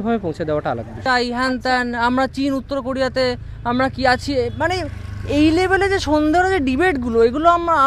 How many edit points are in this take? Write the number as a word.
one